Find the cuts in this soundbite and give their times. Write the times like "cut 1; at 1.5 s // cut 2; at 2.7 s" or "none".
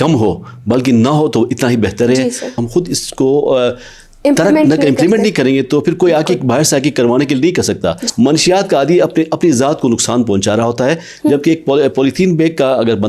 cut 1; at 2.6 s // cut 2; at 8.0 s